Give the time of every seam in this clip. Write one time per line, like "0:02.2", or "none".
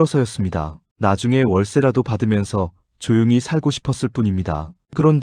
none